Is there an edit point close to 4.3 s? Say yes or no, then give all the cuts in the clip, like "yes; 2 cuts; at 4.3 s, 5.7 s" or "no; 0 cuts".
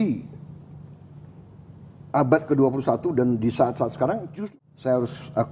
yes; 1 cut; at 4.3 s